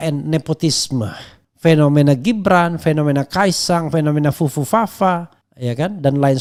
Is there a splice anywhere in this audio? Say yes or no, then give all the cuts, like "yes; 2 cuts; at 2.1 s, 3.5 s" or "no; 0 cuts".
no; 0 cuts